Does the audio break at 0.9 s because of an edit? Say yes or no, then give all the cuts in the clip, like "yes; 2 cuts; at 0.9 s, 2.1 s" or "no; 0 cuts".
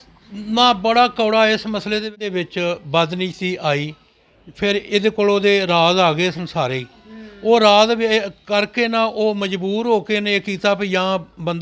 no; 1 cut; at 2.2 s